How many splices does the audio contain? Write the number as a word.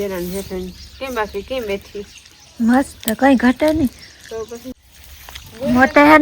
one